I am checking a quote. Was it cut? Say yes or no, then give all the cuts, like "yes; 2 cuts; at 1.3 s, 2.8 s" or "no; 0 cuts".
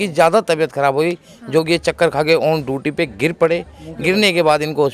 no; 0 cuts